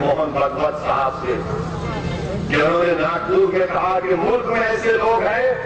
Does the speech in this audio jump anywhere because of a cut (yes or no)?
no